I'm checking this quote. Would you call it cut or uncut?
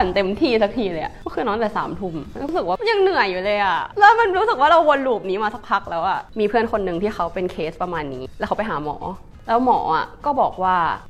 cut